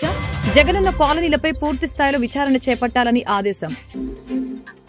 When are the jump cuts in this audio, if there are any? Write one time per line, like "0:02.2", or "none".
0:03.8